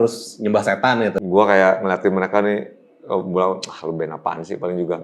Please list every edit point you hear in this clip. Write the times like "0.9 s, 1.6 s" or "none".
1.2 s